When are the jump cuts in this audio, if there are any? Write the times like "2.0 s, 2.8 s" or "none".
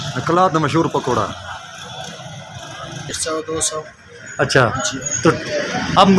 3.2 s